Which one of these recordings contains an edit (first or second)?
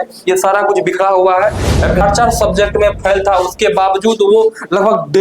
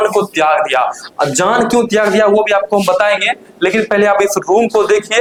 first